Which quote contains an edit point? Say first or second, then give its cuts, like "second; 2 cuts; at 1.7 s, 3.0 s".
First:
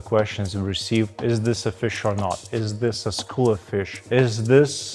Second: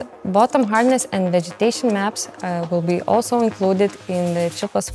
first; 1 cut; at 4.0 s